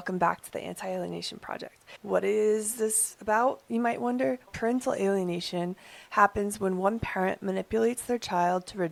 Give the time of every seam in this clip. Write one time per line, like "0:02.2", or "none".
none